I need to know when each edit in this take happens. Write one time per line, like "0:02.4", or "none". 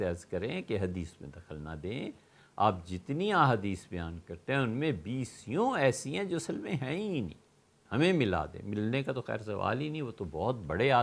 0:07.8